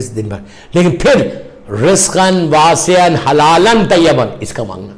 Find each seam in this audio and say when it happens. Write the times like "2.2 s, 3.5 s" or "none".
none